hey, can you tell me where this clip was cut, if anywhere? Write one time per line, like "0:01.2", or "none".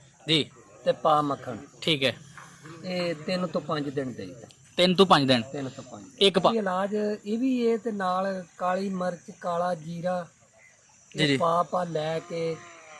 0:06.5